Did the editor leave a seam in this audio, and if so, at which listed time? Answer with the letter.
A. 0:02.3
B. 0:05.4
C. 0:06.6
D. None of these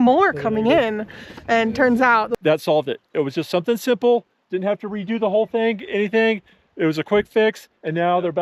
A